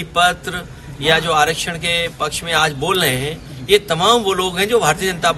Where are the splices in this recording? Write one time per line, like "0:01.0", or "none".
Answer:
none